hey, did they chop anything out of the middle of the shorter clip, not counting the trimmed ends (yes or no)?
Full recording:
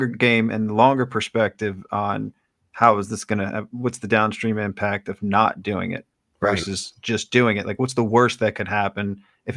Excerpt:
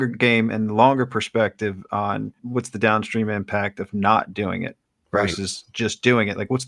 yes